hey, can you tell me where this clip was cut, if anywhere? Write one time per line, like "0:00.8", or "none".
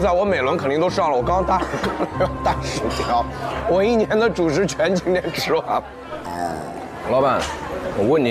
0:06.9